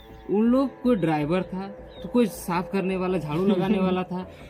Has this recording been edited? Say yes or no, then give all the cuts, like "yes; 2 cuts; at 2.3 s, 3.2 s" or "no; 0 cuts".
no; 0 cuts